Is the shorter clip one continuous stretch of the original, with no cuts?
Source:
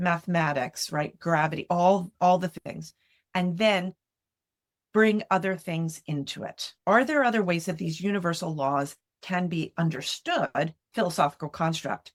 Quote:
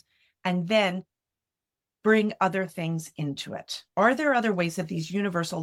yes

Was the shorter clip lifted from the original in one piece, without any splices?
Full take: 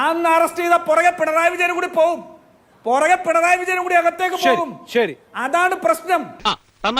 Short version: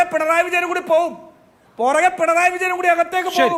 yes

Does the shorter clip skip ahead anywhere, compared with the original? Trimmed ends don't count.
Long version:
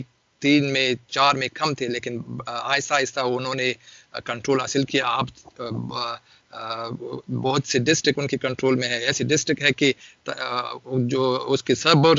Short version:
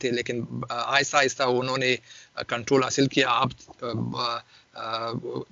no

